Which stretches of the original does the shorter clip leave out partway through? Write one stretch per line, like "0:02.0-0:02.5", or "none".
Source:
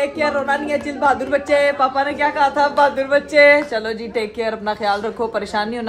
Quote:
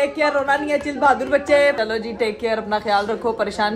0:01.8-0:03.7

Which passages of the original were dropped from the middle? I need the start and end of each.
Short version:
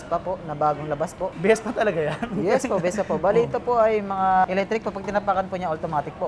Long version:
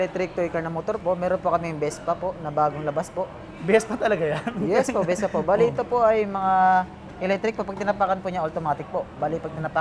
0:03.3-0:03.6
0:06.7-0:07.2

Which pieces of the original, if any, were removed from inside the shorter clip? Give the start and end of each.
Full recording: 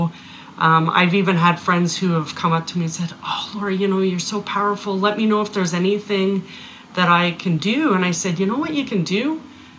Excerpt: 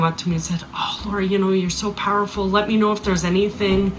none

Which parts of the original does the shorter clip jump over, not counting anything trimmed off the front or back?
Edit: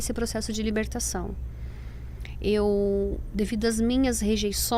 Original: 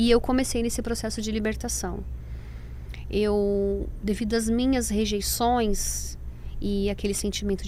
none

